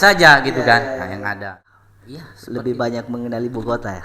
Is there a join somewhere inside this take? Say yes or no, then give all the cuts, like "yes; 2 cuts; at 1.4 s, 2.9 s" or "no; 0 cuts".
yes; 1 cut; at 1.5 s